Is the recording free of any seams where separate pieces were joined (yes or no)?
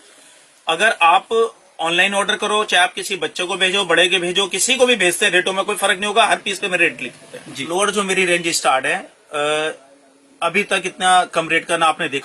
no